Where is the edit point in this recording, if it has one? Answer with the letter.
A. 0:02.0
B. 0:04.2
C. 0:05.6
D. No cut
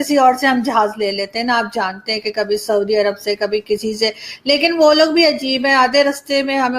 D